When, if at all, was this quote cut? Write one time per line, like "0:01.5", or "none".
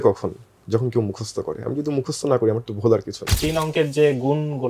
0:03.3